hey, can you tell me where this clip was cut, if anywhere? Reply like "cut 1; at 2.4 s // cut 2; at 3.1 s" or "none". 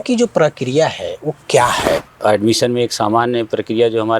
cut 1; at 2.1 s